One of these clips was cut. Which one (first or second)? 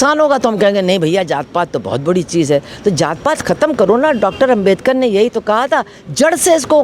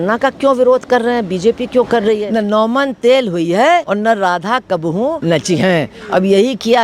second